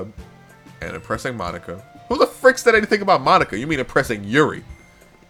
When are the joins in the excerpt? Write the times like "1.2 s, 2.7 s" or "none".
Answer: none